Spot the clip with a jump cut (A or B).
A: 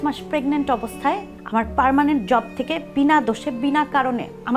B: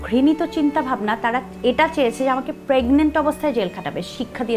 A